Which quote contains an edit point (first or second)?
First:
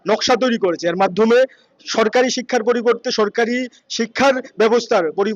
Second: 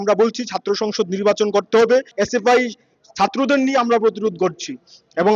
second